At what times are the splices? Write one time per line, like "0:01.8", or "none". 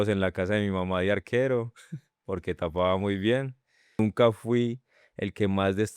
0:04.0